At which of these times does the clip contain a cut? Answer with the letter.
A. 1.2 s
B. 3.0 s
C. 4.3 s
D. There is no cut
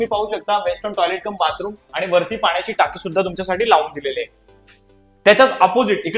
D